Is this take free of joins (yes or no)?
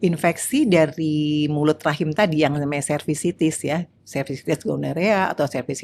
yes